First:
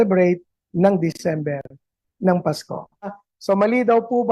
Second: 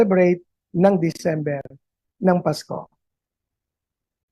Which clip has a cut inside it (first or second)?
first